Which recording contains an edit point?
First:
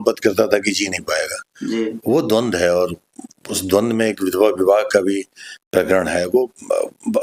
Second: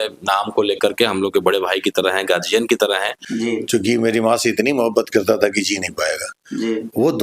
second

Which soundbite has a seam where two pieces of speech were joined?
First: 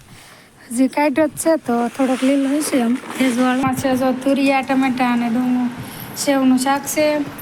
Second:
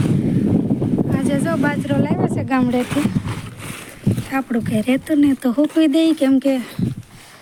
first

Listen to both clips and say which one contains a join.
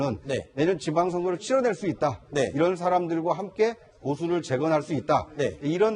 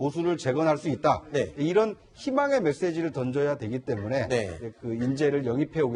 first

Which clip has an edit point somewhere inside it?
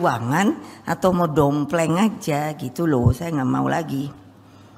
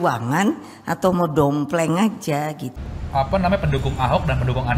second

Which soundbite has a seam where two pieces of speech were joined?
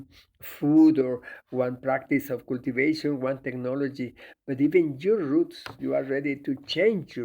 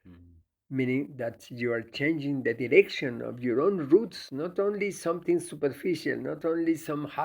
first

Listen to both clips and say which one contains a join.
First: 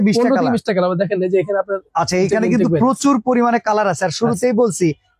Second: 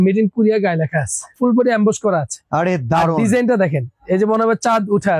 second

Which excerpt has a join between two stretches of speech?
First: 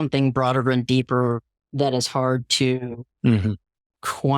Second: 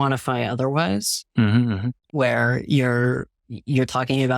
second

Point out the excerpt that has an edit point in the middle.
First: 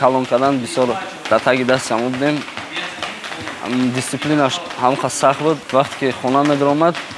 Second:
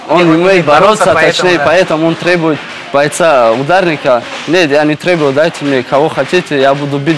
first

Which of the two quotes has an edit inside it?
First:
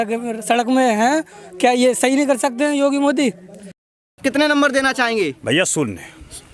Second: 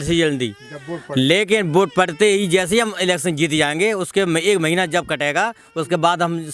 first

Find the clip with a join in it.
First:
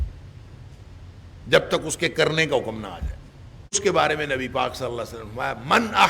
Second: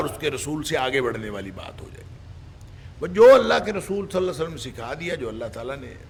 first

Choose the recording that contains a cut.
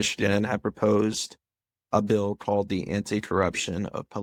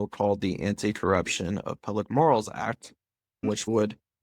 second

